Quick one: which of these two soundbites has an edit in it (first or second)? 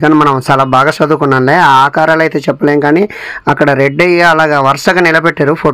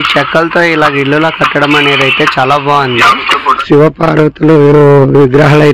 second